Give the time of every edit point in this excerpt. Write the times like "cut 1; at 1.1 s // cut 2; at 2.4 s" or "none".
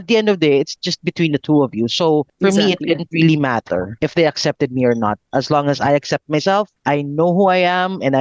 cut 1; at 2.3 s // cut 2; at 3.9 s // cut 3; at 6.7 s